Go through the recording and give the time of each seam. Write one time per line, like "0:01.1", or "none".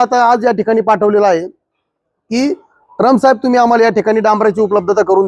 none

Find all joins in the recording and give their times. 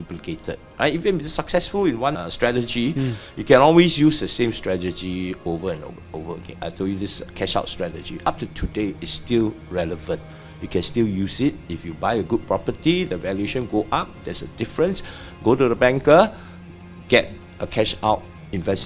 0:02.2
0:06.5

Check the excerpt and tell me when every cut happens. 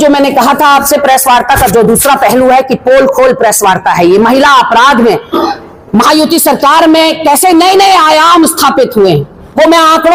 none

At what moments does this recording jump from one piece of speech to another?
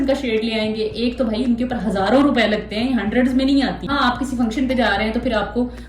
0:03.9

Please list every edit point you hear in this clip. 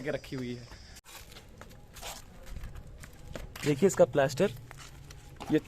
0:00.9

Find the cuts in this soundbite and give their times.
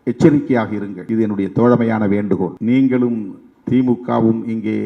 0:00.9
0:02.5

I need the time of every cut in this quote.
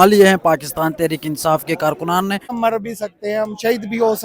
0:02.6

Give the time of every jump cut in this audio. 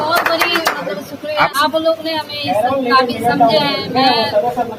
0:01.6

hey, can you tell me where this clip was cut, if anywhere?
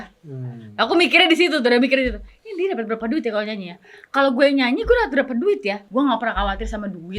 0:05.8

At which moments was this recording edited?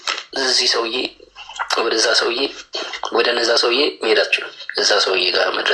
none

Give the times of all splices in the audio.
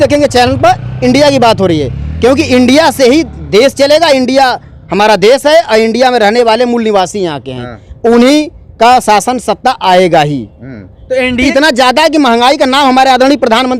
0:11.5

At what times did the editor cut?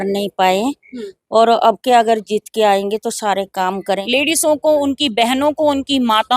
0:04.0

